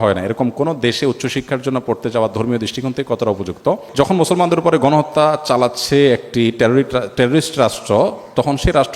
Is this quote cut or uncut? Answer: cut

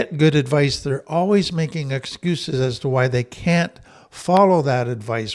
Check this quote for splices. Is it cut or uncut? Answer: uncut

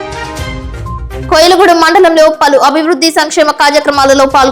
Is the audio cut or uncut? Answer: uncut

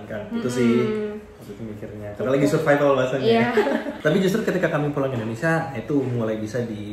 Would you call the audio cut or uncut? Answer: uncut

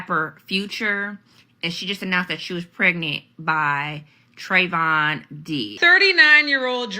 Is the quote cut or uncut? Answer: cut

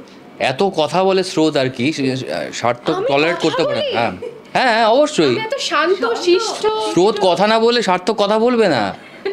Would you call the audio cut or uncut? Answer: uncut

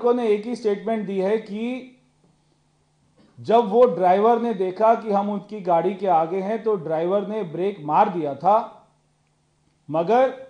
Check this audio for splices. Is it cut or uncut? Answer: uncut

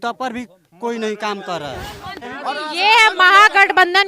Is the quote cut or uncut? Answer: cut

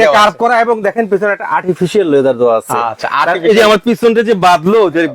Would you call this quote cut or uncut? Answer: uncut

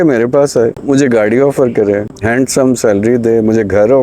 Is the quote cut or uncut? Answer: cut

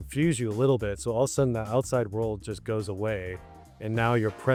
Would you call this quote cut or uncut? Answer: uncut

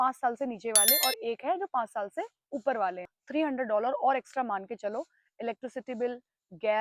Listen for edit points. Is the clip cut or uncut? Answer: cut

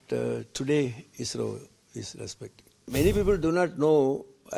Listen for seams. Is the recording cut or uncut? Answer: cut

